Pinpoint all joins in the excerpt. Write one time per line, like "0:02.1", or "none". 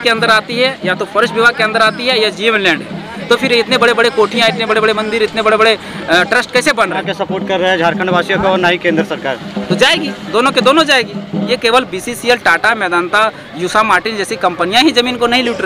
0:07.1
0:11.5